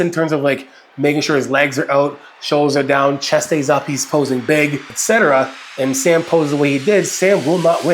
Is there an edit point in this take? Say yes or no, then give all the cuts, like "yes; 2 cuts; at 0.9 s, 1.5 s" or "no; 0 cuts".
yes; 1 cut; at 4.9 s